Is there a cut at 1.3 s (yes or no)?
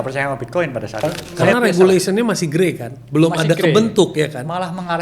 yes